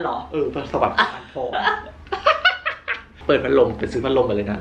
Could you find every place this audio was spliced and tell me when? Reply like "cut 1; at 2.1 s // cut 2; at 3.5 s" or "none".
cut 1; at 3.1 s

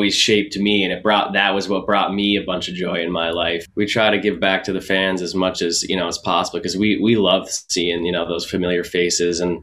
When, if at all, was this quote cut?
cut 1; at 3.6 s

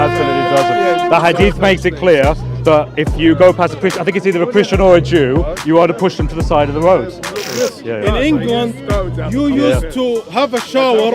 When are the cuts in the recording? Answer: cut 1; at 7.5 s

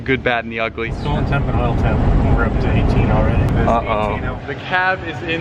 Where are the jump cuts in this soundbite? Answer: cut 1; at 0.9 s // cut 2; at 3.5 s // cut 3; at 4.4 s

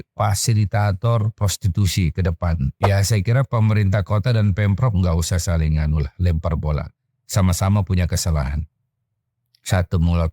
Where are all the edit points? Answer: cut 1; at 2.8 s

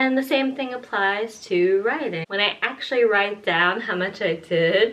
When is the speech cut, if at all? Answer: cut 1; at 2.2 s

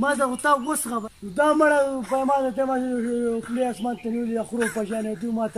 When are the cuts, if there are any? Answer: cut 1; at 0.9 s

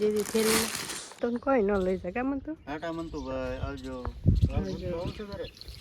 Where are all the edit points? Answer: cut 1; at 1.2 s

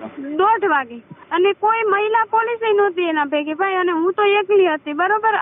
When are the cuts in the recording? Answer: cut 1; at 1.1 s

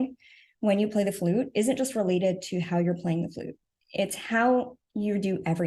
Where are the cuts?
none

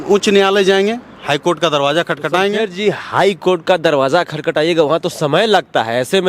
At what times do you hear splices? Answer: none

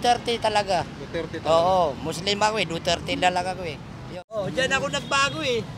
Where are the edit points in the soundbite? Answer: cut 1; at 4.4 s

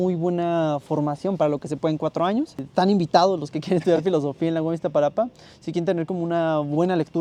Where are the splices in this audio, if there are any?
none

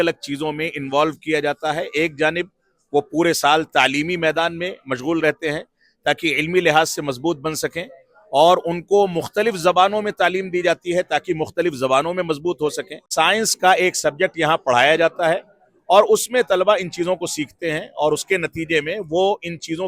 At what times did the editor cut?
cut 1; at 13.1 s

